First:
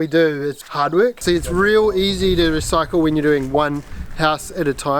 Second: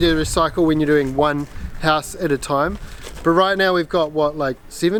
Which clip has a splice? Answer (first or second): first